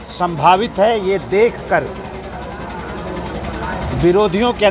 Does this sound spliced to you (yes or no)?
no